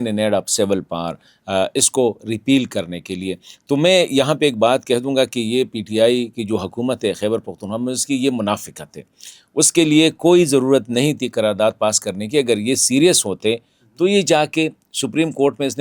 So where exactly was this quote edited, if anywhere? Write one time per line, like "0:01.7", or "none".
none